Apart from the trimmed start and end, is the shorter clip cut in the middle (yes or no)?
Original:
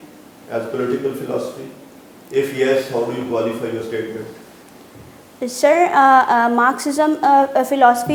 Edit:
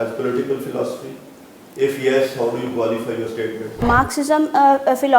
yes